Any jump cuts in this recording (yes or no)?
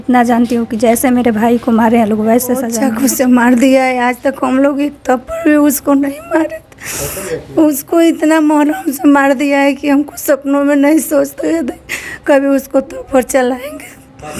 yes